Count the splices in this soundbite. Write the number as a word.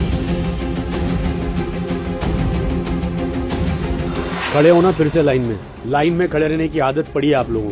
zero